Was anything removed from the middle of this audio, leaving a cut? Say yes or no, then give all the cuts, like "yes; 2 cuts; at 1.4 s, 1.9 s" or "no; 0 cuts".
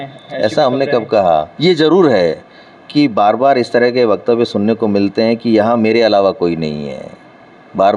yes; 1 cut; at 1.5 s